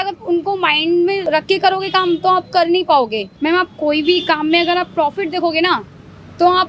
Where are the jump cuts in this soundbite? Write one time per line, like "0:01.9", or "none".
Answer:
0:01.3
0:03.3